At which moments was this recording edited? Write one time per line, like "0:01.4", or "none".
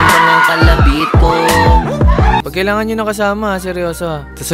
0:02.4